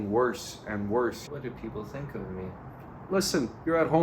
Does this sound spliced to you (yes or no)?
yes